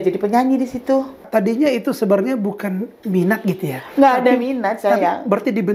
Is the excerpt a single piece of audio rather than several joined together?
no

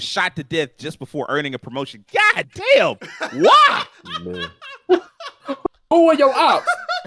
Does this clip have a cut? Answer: no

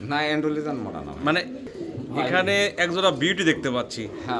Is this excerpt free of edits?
no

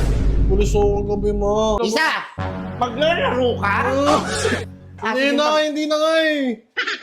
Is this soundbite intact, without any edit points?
no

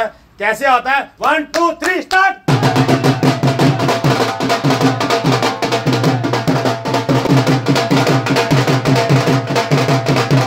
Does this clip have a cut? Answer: yes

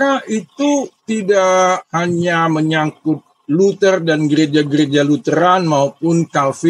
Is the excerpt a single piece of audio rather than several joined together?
no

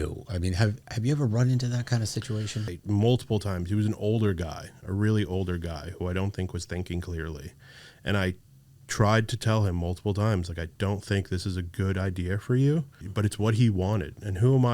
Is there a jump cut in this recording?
yes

